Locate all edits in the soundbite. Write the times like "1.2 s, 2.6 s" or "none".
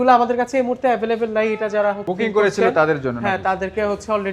none